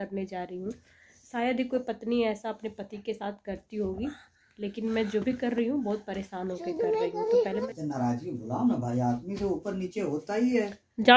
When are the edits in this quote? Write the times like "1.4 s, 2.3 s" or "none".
7.6 s